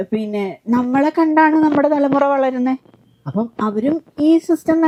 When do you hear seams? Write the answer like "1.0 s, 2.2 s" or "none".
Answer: none

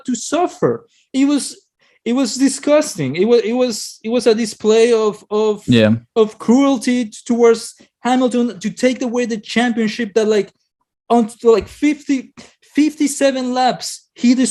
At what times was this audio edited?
none

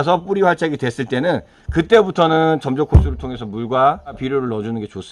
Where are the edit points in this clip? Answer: 4.2 s

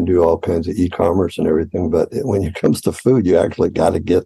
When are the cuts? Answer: none

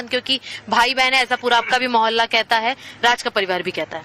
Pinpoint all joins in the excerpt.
2.9 s

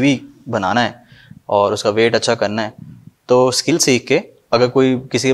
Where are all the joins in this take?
3.9 s

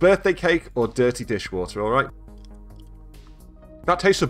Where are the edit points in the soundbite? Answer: 2.1 s, 3.4 s

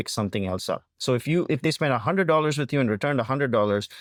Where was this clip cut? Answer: none

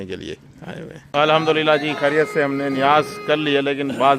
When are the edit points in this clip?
1.1 s

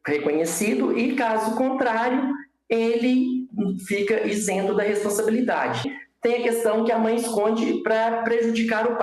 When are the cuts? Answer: 6.0 s

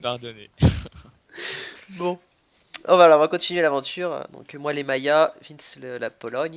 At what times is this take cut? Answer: 3.6 s

